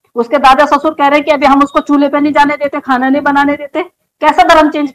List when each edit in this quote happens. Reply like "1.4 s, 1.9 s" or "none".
none